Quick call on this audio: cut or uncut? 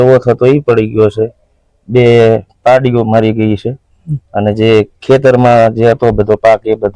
uncut